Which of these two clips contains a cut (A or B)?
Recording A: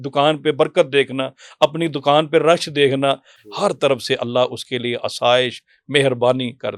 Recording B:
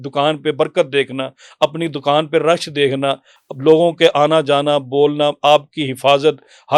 A